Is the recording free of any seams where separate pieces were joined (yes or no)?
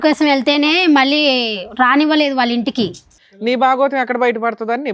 no